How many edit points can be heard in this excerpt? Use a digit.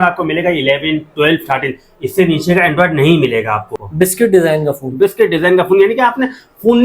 1